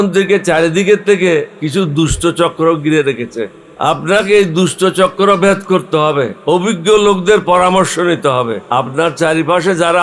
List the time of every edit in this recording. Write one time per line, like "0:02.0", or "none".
0:01.6
0:03.6
0:06.4
0:08.6